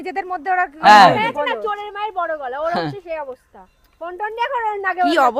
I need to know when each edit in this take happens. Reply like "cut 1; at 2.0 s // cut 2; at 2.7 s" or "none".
none